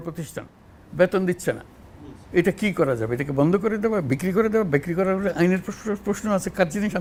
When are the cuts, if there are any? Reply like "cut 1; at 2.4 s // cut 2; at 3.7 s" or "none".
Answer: none